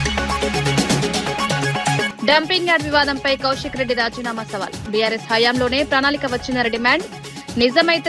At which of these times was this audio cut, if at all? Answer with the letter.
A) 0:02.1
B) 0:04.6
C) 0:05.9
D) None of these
A